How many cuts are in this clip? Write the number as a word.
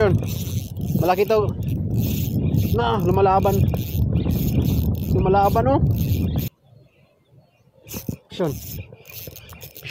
one